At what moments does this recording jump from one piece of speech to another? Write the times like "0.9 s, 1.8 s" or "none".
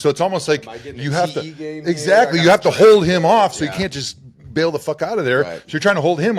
none